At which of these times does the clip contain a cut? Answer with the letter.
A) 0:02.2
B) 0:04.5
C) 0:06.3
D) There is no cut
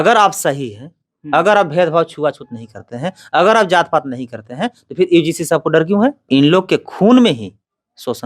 C